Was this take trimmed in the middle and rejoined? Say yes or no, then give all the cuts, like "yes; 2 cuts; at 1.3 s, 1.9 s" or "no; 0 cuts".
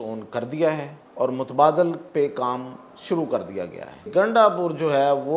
yes; 2 cuts; at 1.0 s, 4.1 s